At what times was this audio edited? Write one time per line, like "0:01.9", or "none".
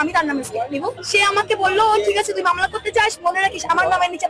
0:01.0